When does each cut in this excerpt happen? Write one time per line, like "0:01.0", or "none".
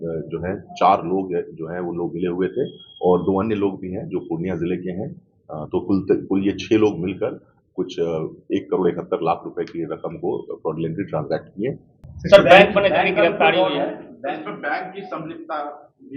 0:12.0